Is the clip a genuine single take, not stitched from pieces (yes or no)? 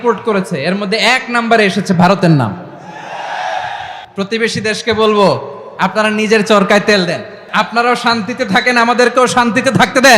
no